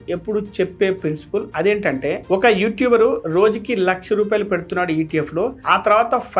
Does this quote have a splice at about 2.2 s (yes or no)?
yes